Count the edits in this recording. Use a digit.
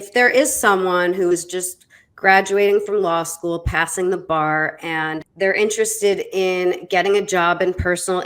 1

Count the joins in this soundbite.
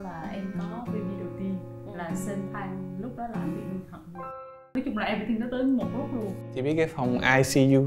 2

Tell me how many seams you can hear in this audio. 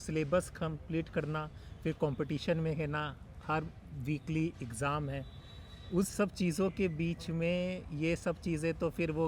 0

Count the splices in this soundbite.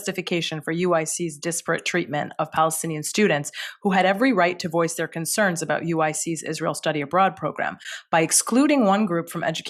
0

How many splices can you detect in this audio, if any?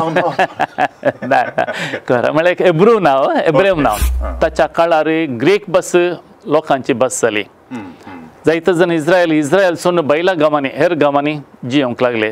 1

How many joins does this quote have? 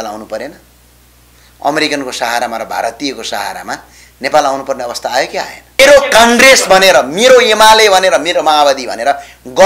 1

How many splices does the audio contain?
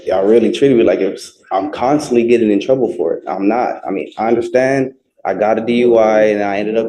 0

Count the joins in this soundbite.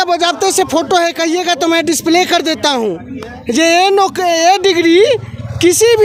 0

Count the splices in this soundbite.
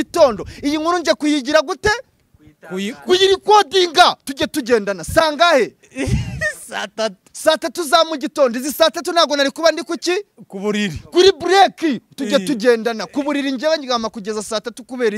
0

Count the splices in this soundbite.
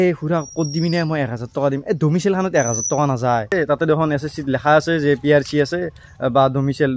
1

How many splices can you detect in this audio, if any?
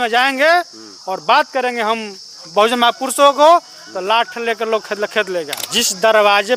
1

